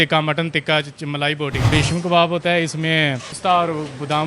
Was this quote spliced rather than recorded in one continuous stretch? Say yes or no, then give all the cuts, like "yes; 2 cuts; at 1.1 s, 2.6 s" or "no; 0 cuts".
yes; 2 cuts; at 1.7 s, 3.3 s